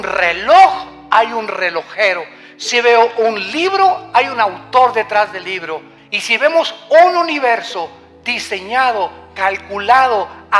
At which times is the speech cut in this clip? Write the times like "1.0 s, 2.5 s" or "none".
6.3 s